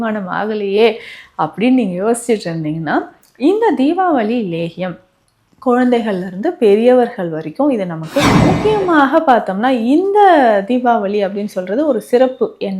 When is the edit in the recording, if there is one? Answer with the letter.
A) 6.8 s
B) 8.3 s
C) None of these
B